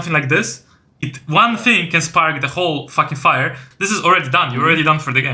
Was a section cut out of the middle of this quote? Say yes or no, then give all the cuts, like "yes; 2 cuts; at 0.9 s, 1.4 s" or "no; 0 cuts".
yes; 1 cut; at 3.7 s